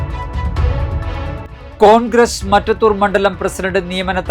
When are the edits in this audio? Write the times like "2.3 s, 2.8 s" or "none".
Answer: 1.3 s